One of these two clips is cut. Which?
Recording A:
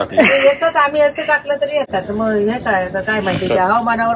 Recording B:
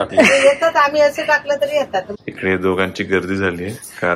B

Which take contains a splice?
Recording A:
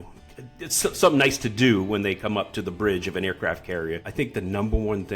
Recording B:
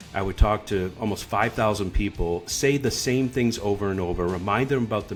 A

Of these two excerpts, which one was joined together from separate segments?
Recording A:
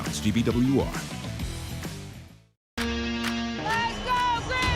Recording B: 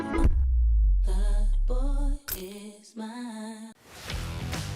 B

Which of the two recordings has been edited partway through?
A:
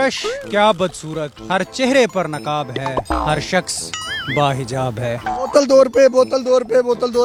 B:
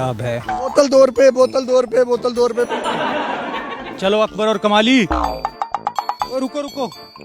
B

